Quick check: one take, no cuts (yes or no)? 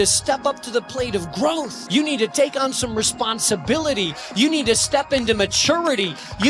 no